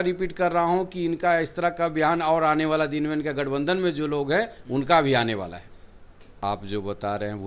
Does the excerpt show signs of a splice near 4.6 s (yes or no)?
no